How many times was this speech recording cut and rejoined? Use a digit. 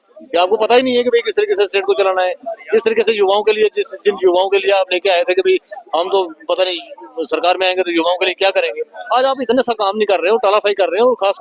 0